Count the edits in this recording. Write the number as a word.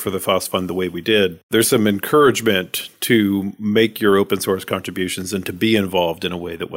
one